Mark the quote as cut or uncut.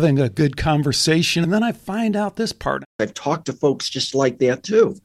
cut